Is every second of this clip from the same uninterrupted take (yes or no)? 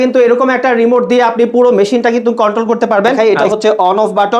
no